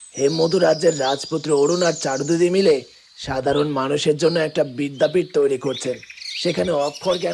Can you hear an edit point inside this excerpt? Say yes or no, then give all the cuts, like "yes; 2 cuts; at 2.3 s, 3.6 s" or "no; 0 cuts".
no; 0 cuts